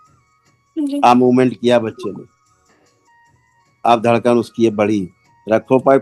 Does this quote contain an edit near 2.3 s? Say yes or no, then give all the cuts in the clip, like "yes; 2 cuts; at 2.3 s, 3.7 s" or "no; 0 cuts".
yes; 2 cuts; at 2.3 s, 3.8 s